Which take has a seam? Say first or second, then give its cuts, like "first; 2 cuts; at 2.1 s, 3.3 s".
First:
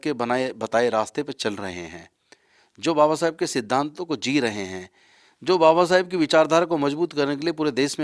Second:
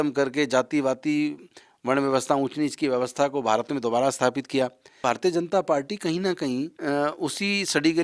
second; 2 cuts; at 4.9 s, 6.7 s